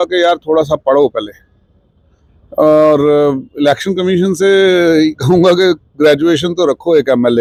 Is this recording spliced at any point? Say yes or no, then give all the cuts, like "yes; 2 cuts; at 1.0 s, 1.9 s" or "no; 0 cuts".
no; 0 cuts